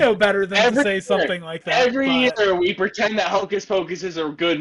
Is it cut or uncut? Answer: uncut